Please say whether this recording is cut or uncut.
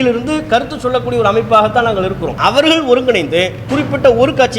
cut